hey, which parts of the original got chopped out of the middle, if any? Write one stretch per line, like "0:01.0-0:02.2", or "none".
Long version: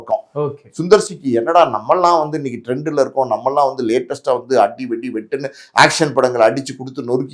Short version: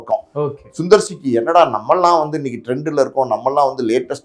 none